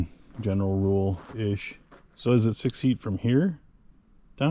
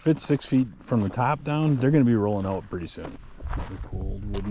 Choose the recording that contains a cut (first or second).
second